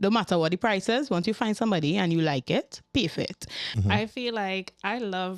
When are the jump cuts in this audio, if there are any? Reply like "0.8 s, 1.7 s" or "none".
3.7 s

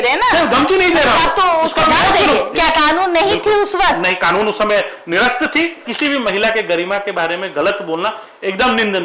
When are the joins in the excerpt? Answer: 2.5 s, 5.8 s

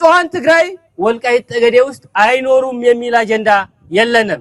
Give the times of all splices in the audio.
none

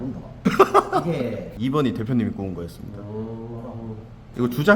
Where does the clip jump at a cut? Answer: 1.5 s

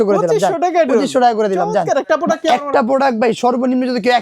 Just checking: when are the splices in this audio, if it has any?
2.0 s

